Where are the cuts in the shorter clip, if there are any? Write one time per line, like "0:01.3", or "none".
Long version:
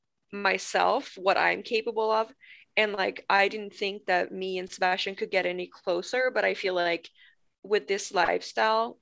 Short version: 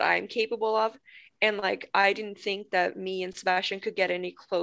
none